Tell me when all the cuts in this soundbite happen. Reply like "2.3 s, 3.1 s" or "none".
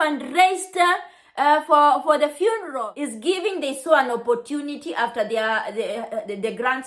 2.7 s